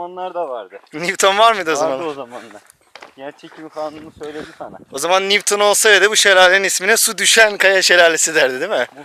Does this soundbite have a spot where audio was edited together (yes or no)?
no